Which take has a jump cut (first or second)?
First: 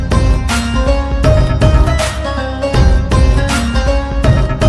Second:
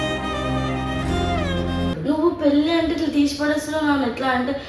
second